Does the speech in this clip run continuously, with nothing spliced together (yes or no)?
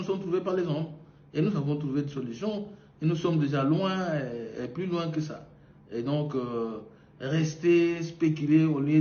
yes